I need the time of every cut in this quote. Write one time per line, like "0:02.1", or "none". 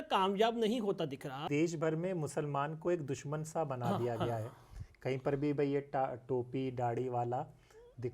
0:01.4